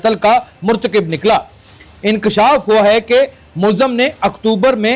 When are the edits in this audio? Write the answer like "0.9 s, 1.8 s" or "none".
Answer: none